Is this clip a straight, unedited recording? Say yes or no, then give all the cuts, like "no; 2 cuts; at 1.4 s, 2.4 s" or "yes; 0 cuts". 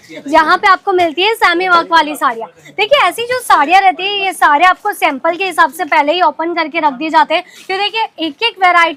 yes; 0 cuts